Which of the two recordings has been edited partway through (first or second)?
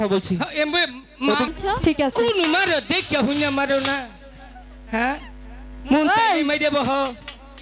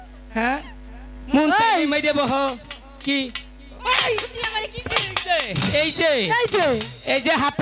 first